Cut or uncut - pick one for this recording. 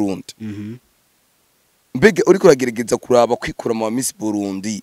uncut